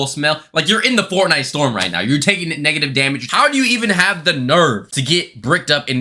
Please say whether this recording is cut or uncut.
cut